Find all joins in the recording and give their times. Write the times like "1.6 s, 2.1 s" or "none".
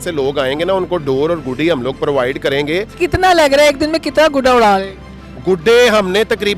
2.9 s